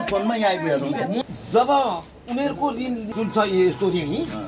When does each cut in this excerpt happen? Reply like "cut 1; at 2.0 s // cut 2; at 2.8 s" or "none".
cut 1; at 1.3 s